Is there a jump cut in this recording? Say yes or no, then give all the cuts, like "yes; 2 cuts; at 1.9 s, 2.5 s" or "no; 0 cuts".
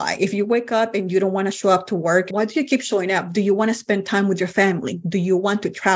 yes; 1 cut; at 2.3 s